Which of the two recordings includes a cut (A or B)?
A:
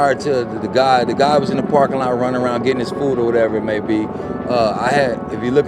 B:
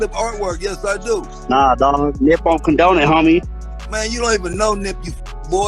B